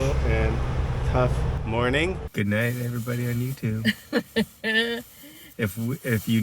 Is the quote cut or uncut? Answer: cut